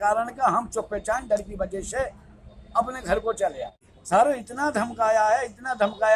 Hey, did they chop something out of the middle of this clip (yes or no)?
yes